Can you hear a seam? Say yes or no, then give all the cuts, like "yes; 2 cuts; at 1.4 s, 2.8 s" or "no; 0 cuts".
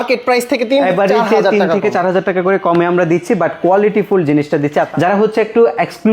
yes; 1 cut; at 4.9 s